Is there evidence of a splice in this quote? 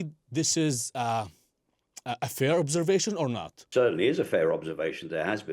yes; 1 cut; at 3.5 s

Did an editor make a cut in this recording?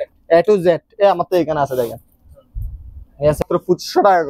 yes; 1 cut; at 3.4 s

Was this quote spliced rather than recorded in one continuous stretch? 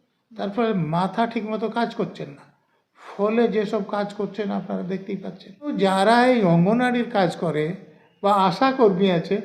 yes; 1 cut; at 5.7 s

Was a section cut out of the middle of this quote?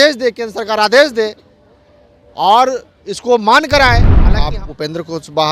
yes; 1 cut; at 4.2 s

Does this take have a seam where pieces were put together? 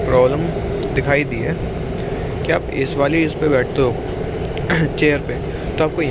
no; 0 cuts

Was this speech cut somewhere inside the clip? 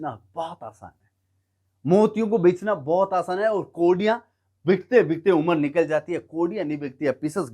no; 0 cuts

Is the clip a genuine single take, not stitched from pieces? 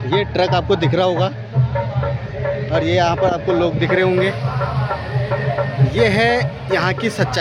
yes; 0 cuts

